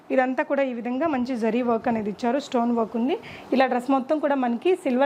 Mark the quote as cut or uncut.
uncut